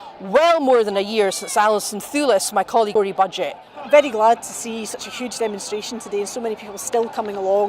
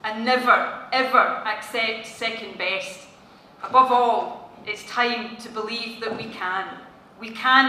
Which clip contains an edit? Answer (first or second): first